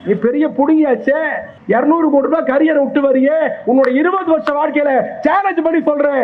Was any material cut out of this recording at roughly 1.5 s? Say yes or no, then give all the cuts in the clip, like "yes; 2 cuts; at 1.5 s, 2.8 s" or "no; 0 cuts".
yes; 1 cut; at 1.5 s